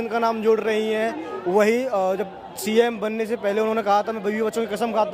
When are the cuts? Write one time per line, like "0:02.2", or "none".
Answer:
none